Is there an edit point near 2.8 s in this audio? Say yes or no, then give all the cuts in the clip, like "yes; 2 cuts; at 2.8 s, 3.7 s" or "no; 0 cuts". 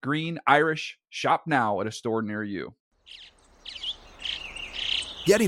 yes; 1 cut; at 2.8 s